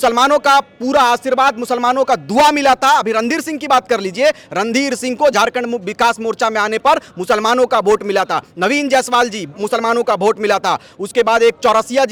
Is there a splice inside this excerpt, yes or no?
no